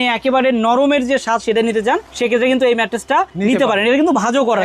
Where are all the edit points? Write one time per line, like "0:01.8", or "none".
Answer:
none